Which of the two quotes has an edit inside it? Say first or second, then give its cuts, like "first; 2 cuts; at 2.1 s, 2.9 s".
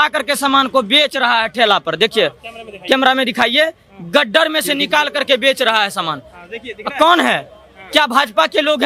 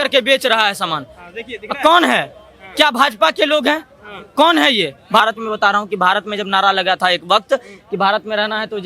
second; 1 cut; at 5.2 s